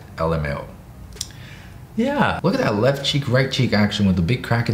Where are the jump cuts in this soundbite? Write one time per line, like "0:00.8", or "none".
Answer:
0:02.4